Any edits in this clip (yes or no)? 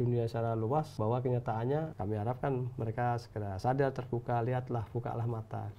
yes